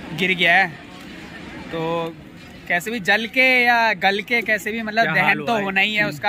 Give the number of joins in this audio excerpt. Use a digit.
0